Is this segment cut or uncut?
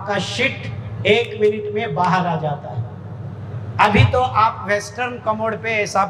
uncut